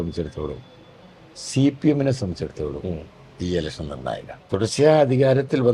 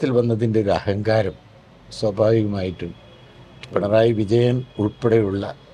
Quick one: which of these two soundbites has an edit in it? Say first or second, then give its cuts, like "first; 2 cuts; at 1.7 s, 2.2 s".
first; 1 cut; at 4.3 s